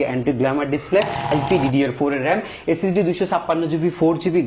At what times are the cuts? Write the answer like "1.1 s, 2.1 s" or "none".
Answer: 1.3 s